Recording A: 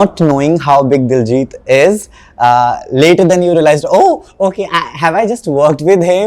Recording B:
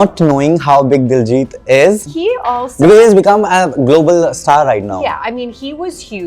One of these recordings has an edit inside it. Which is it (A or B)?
B